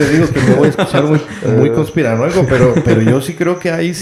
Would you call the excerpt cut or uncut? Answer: uncut